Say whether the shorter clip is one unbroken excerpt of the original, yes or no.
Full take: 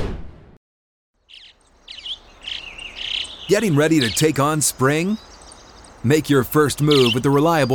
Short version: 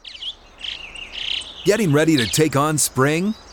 yes